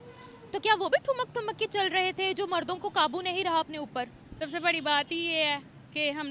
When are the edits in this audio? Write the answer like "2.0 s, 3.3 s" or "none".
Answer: 4.2 s